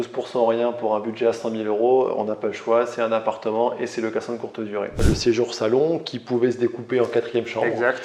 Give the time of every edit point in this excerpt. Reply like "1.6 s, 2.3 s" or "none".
5.0 s